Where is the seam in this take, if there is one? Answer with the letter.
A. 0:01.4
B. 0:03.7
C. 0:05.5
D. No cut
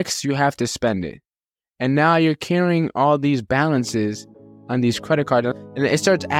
C